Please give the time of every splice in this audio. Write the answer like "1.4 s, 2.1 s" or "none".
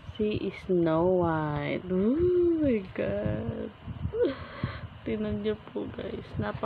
none